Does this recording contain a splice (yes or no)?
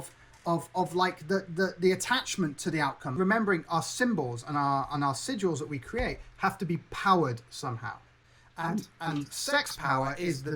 yes